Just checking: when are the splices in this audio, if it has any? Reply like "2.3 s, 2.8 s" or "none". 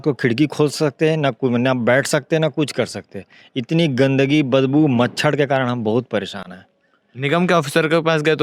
none